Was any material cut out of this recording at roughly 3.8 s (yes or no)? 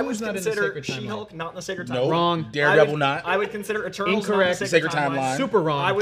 no